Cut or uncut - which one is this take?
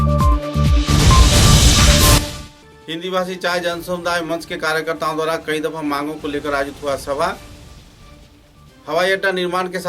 uncut